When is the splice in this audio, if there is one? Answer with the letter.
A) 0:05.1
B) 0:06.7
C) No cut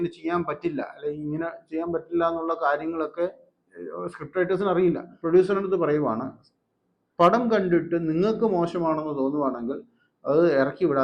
A